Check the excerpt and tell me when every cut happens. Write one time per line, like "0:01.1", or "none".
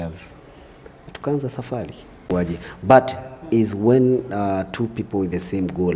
0:02.3